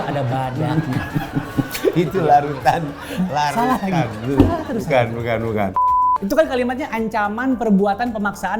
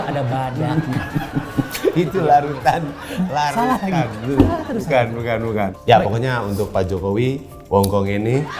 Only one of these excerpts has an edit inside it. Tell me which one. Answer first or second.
first